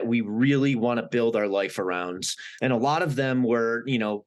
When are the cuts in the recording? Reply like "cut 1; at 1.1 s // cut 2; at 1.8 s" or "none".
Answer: cut 1; at 2.4 s